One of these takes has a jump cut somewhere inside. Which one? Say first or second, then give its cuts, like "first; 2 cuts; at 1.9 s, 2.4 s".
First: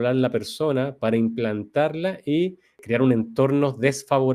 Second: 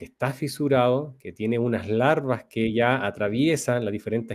first; 1 cut; at 2.8 s